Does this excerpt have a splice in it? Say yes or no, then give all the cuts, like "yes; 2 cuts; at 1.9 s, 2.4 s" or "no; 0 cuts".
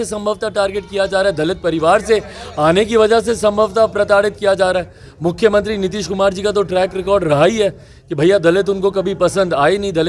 no; 0 cuts